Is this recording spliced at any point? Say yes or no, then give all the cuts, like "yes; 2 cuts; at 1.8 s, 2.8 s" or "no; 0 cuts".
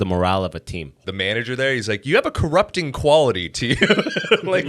yes; 1 cut; at 1.0 s